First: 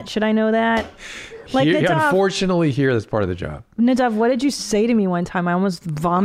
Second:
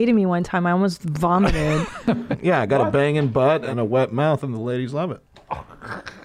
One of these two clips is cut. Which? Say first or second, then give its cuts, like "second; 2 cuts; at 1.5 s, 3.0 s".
second; 2 cuts; at 2.3 s, 3.7 s